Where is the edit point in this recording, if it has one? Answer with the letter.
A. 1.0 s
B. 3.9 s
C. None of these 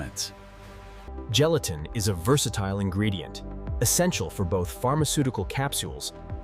A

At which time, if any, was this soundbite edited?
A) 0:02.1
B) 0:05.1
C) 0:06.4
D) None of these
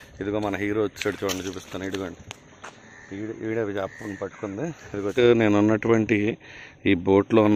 B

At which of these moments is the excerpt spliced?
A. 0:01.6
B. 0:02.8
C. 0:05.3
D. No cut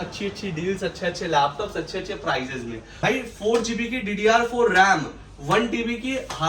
B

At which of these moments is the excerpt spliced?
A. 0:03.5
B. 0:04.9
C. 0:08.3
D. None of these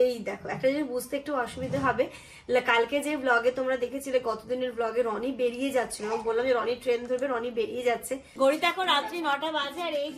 C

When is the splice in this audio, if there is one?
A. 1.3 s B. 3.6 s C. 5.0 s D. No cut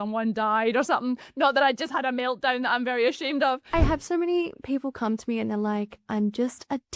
B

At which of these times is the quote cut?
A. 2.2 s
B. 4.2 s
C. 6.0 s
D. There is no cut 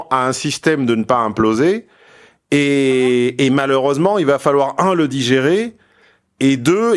D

